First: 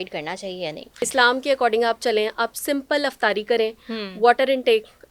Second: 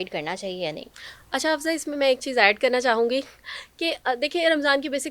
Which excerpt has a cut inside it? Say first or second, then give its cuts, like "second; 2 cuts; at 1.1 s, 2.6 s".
first; 1 cut; at 1.0 s